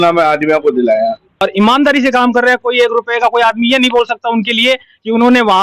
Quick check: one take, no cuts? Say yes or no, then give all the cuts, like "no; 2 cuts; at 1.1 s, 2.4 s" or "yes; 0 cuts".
no; 1 cut; at 1.4 s